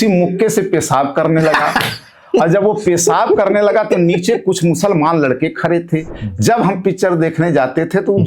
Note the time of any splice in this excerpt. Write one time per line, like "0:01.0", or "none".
0:06.1